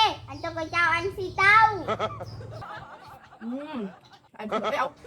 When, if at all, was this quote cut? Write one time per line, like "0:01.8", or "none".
0:02.6